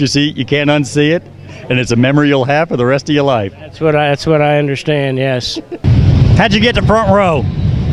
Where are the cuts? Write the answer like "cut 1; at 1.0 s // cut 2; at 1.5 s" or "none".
none